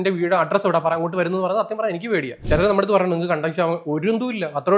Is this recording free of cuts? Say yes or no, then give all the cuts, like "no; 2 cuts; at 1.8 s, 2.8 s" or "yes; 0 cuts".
no; 1 cut; at 2.3 s